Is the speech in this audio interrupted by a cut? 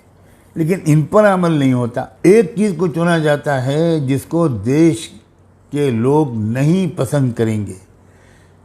yes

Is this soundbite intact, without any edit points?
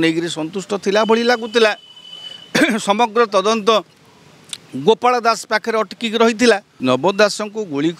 no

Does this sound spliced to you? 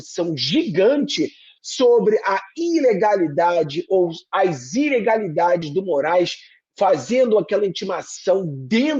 no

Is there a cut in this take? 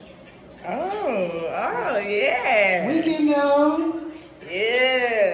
no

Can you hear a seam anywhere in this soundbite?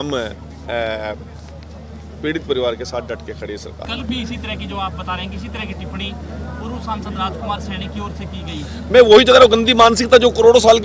yes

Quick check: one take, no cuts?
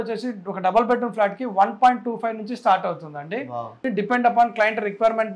no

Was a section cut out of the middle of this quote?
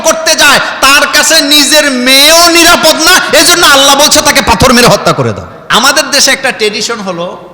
yes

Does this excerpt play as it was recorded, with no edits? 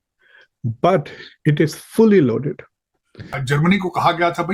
no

